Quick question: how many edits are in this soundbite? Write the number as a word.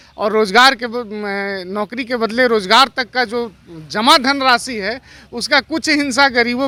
zero